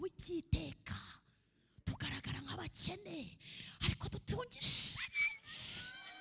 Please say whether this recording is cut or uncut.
uncut